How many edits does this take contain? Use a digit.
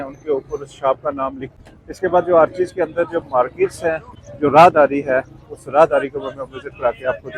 1